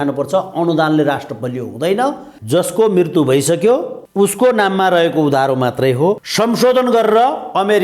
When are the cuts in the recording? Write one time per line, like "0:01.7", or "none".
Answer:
0:02.3
0:04.0
0:06.3